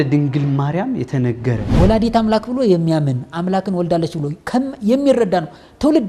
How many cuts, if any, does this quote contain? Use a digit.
1